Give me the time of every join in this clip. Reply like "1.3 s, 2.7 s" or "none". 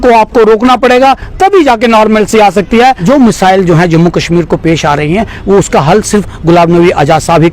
3.0 s

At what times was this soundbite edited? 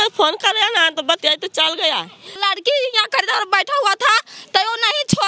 2.4 s

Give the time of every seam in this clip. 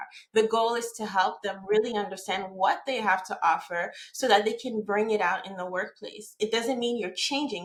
none

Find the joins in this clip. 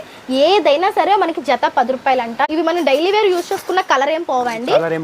2.4 s

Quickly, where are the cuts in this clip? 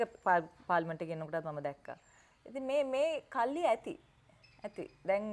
none

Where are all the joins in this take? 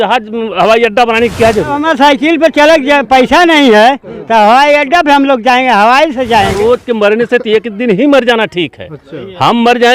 1.8 s, 6.6 s

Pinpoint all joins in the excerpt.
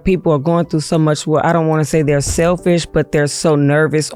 none

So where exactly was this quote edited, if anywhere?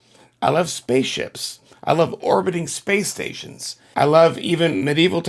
3.8 s

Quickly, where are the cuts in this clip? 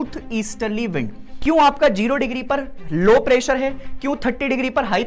1.3 s

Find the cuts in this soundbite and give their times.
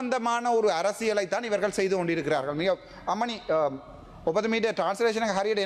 none

